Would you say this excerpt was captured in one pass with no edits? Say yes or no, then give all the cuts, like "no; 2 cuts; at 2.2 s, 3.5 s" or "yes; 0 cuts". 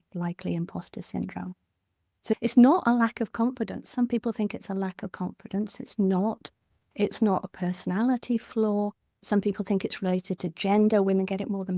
no; 2 cuts; at 2.3 s, 9.2 s